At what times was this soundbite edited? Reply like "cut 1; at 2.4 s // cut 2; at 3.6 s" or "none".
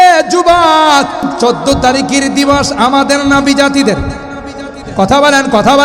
cut 1; at 1.3 s